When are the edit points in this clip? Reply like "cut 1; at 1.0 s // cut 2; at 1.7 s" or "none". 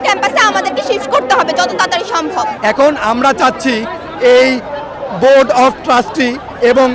cut 1; at 2.6 s